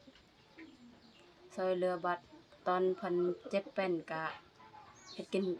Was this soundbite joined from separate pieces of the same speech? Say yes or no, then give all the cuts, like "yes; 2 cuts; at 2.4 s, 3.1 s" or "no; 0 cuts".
no; 0 cuts